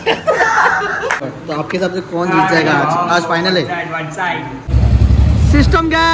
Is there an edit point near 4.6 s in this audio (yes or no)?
yes